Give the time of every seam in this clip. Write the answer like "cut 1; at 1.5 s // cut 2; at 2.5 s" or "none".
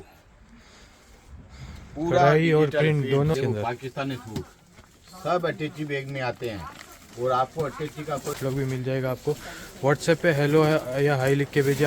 cut 1; at 3.3 s // cut 2; at 8.4 s

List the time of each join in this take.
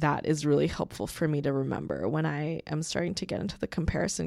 none

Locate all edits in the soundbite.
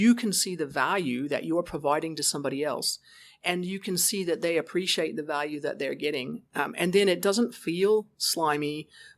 none

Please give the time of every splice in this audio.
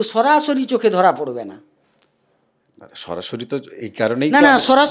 none

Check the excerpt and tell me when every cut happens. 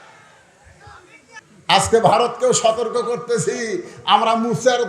cut 1; at 1.4 s

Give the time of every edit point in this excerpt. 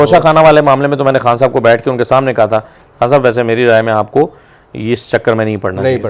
none

